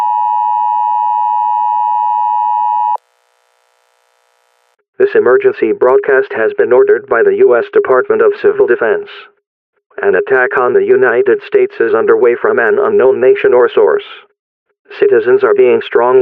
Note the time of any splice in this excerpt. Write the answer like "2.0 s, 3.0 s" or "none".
2.9 s